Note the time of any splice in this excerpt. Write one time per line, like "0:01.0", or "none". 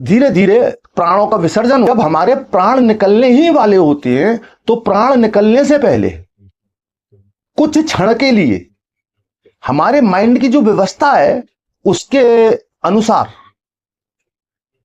0:01.9